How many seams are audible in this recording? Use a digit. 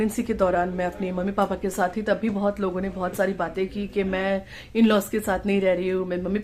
0